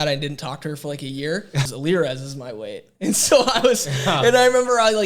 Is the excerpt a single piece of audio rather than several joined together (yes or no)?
no